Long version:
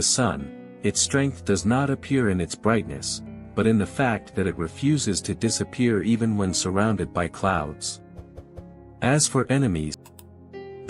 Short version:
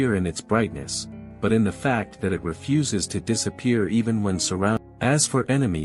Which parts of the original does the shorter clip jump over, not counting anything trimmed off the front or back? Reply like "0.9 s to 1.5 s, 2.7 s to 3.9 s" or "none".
6.9 s to 8.8 s